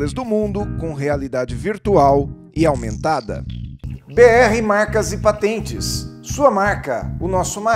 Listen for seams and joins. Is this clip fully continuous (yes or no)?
yes